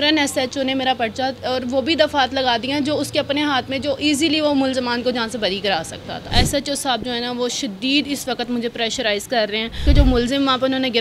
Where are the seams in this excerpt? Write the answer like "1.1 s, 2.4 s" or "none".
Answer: 6.3 s, 9.8 s